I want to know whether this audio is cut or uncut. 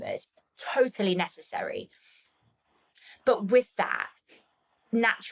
uncut